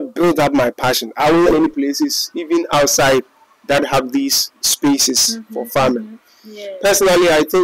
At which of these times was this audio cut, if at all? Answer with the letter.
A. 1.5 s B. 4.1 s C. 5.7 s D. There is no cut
A